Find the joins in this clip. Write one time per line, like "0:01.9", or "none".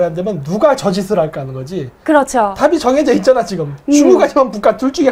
none